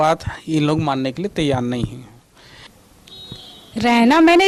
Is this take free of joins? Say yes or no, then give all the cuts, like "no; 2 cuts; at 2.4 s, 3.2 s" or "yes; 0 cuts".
yes; 0 cuts